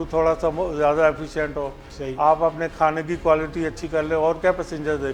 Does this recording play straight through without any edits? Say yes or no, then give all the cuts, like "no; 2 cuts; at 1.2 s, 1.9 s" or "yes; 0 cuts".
yes; 0 cuts